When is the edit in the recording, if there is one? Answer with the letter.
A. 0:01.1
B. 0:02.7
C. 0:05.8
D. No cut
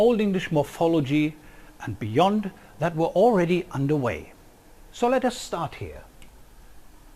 C